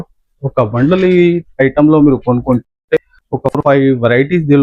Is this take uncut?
yes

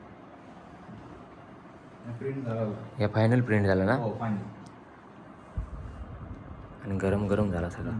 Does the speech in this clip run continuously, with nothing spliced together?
yes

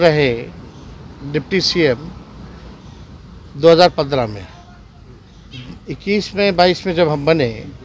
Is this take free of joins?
yes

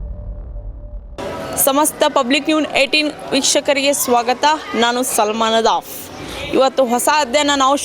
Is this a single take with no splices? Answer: no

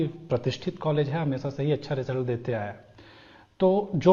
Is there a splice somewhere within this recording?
no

